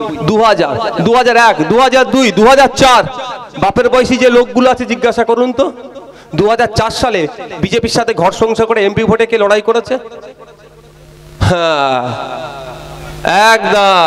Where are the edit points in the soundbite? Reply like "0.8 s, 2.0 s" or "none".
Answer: none